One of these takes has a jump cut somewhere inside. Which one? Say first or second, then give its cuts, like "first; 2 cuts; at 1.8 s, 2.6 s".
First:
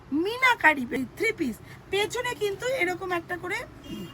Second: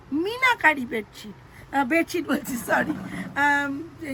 first; 1 cut; at 1.0 s